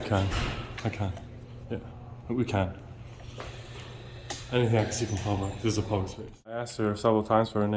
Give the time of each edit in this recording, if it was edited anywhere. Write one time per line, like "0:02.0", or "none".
0:06.7